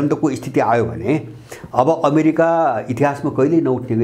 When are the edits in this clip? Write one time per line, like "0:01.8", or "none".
none

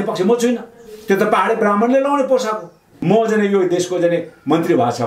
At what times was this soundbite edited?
0:02.9

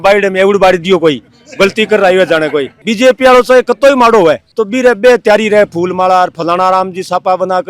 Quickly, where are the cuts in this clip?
0:02.8

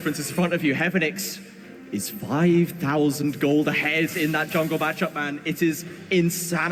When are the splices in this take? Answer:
none

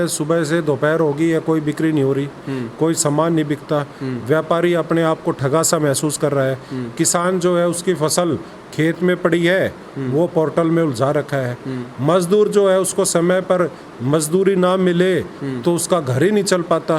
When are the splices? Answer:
none

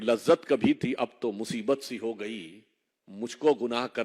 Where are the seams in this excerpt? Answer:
none

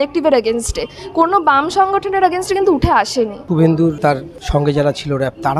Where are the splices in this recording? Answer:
none

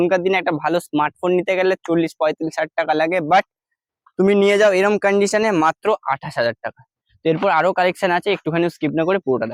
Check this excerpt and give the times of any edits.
none

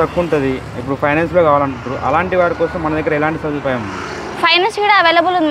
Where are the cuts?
none

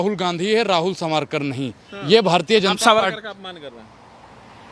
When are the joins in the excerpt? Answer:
none

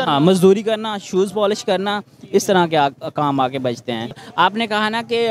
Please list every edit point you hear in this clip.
0:04.2

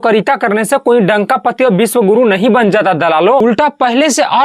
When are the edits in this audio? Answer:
0:03.4

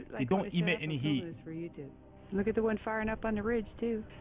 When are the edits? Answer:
none

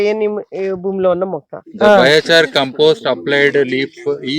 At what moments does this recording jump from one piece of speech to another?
0:01.6

